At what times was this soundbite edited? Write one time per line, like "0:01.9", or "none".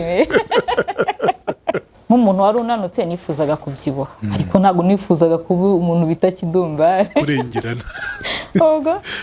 0:01.9